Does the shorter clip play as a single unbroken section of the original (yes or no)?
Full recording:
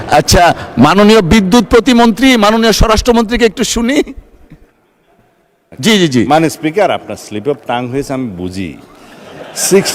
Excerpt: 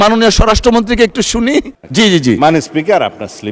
no